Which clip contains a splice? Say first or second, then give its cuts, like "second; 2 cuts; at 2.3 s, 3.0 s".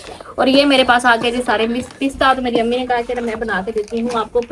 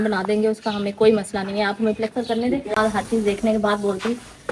second; 1 cut; at 2.8 s